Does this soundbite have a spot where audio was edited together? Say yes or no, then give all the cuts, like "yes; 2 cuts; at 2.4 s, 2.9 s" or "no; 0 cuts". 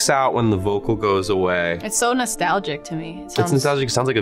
no; 0 cuts